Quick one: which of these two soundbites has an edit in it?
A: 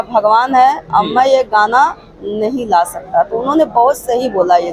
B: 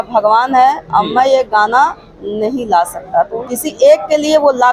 B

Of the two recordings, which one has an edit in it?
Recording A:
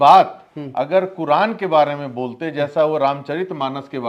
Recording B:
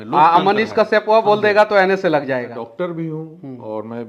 B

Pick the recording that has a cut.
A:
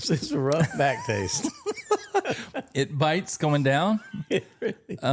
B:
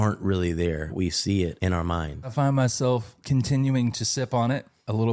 B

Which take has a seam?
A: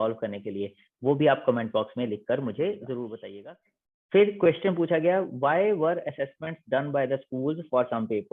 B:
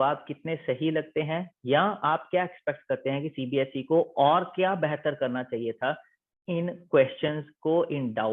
A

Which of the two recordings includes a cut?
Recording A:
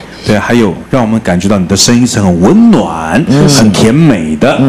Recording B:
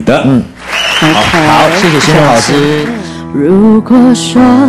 B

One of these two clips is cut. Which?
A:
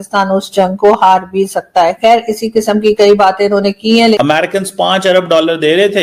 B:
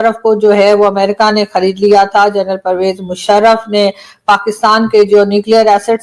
A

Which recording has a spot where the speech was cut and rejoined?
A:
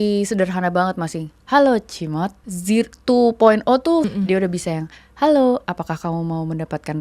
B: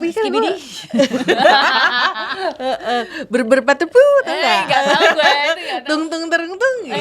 A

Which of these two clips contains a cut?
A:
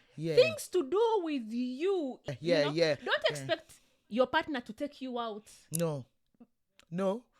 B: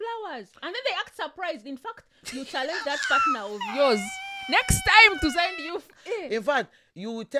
A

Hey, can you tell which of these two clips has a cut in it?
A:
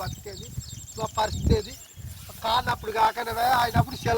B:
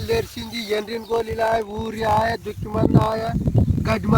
A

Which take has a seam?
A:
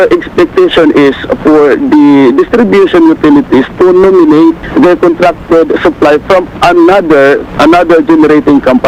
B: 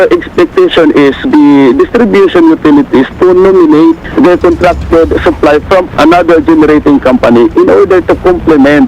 B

